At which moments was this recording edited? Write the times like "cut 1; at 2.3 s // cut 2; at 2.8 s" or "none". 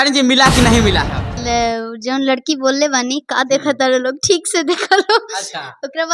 cut 1; at 1.3 s